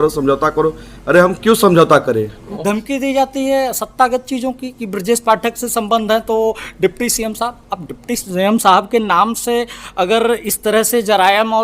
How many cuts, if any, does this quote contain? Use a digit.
1